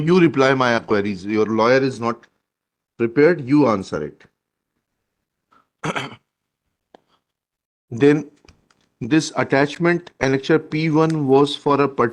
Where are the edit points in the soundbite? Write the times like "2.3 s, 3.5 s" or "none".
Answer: none